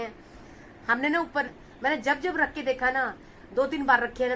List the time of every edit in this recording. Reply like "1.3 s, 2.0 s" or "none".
1.5 s